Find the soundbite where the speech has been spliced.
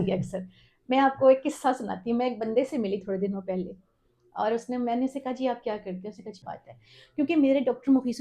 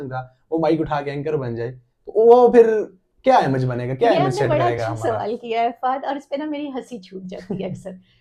first; 1 cut; at 6.4 s

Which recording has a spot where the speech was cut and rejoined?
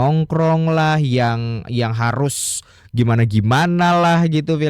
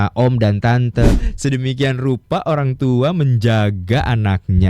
second; 1 cut; at 1.2 s

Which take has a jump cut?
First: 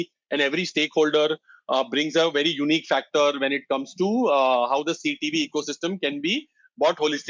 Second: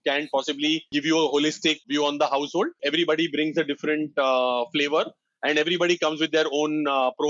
second; 3 cuts; at 0.9 s, 1.8 s, 2.8 s

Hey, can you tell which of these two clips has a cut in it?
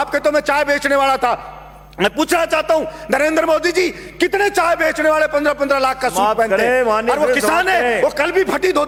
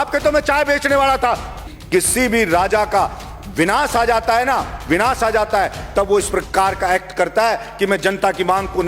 second; 1 cut; at 1.7 s

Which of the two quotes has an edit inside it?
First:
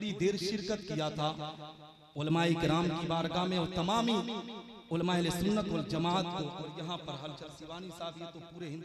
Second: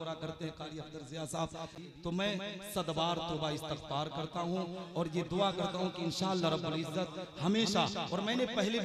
second; 1 cut; at 1.8 s

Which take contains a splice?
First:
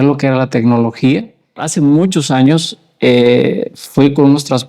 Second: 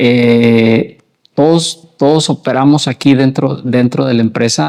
first; 1 cut; at 1.6 s

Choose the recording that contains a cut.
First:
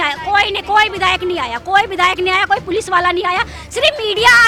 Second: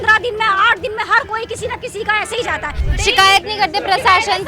second; 1 cut; at 2.8 s

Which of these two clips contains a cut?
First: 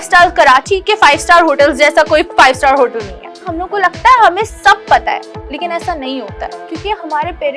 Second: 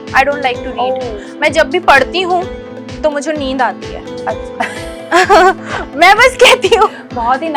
first; 2 cuts; at 3.5 s, 6.5 s

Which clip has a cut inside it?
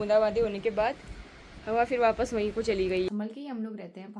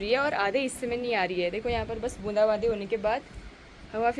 first; 1 cut; at 3.1 s

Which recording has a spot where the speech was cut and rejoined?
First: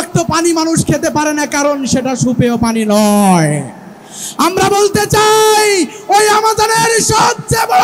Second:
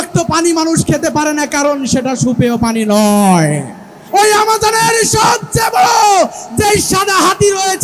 second; 1 cut; at 4.0 s

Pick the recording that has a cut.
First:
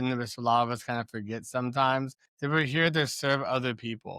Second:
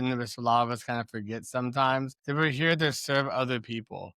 second; 1 cut; at 2.2 s

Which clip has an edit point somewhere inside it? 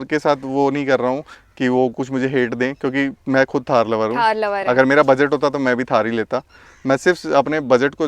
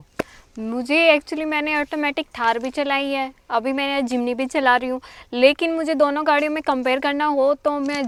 first; 1 cut; at 4.4 s

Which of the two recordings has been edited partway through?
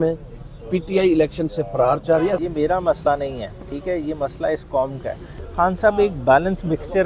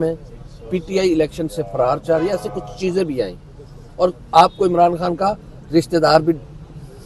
first; 2 cuts; at 2.4 s, 5.4 s

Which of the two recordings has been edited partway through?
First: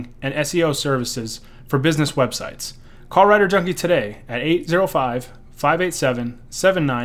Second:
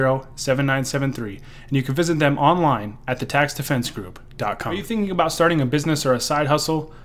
second; 1 cut; at 4.8 s

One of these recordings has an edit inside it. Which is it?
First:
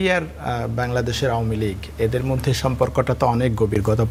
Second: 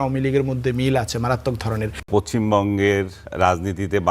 second; 2 cuts; at 2.1 s, 3.2 s

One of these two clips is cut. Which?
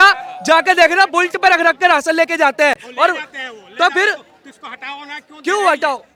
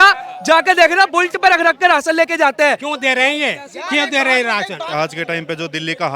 second; 2 cuts; at 2.8 s, 4.9 s

